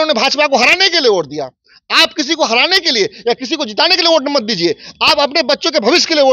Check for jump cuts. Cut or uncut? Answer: uncut